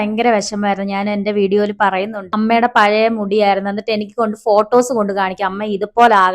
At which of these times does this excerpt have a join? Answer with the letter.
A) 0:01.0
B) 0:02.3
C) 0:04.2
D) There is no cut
B